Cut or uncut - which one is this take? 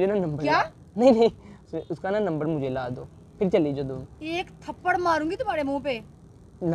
uncut